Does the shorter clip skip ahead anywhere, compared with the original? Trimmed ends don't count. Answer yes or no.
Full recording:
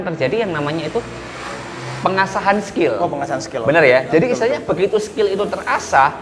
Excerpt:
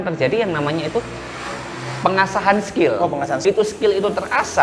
yes